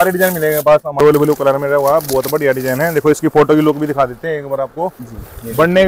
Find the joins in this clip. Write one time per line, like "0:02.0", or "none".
0:01.0